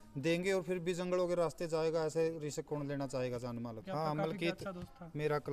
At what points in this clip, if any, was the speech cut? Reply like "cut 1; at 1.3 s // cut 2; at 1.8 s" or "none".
cut 1; at 3.8 s